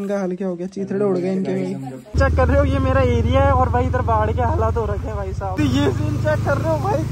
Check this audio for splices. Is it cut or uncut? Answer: cut